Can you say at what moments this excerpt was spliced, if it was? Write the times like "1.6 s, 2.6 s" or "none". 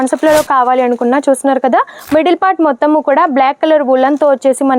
2.0 s